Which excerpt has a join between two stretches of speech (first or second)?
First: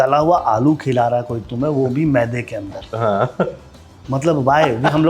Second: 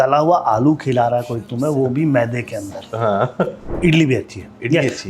second